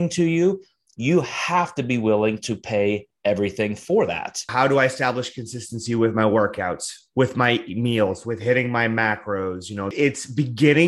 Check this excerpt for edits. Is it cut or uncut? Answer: cut